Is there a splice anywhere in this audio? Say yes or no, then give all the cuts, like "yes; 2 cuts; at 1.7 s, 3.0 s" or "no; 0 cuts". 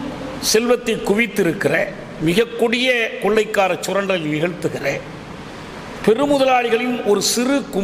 no; 0 cuts